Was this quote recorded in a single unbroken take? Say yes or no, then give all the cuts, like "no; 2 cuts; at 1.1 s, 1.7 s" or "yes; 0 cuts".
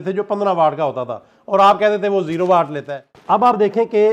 no; 1 cut; at 3.0 s